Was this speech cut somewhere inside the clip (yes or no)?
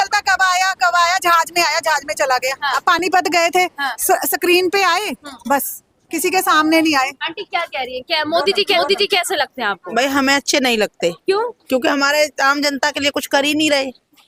no